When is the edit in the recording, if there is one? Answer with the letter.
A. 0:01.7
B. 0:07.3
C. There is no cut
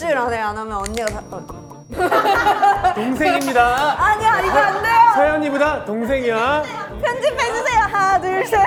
C